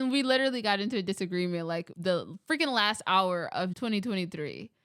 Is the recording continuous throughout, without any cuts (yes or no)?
no